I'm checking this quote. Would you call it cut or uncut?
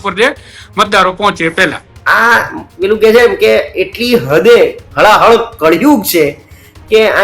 cut